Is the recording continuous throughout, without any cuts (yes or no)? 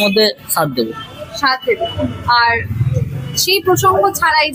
yes